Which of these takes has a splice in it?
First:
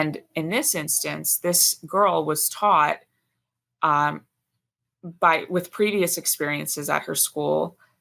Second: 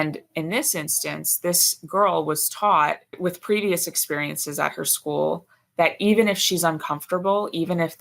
second; 1 cut; at 3.1 s

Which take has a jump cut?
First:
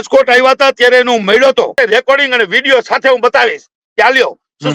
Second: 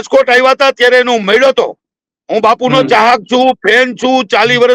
first; 1 cut; at 1.7 s

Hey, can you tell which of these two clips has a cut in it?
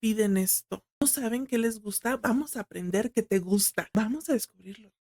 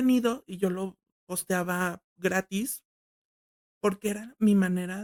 first; 2 cuts; at 1.0 s, 3.9 s

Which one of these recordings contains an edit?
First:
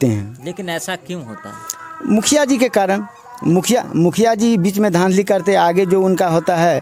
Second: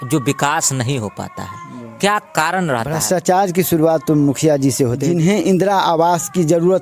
second; 2 cuts; at 2.9 s, 5.0 s

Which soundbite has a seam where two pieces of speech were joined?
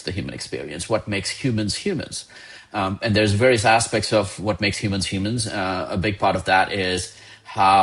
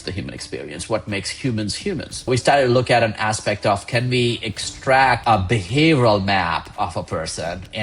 second; 2 cuts; at 2.3 s, 5.2 s

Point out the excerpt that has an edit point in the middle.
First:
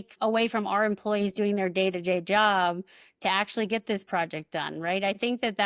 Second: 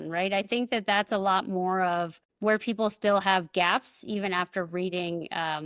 second; 1 cut; at 2.2 s

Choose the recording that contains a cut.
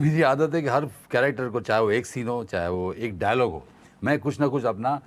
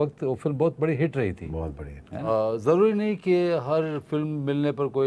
second; 1 cut; at 2.3 s

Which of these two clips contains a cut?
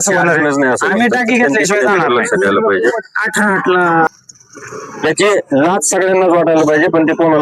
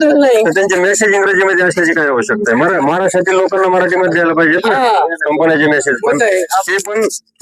first; 1 cut; at 4.1 s

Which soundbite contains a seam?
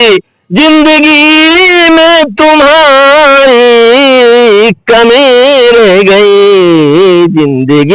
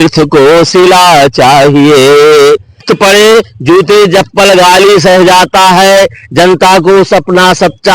second; 1 cut; at 2.9 s

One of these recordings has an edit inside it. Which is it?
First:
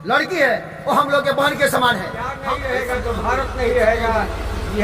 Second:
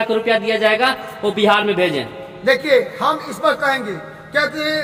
first; 1 cut; at 2.3 s

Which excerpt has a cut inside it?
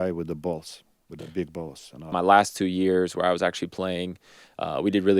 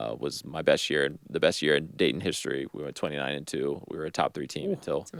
first; 1 cut; at 2.1 s

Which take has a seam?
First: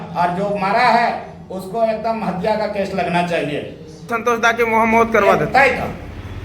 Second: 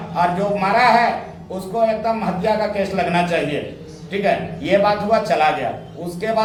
first; 1 cut; at 4.1 s

